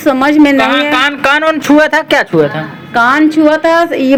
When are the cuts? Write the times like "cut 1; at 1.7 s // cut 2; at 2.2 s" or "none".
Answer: none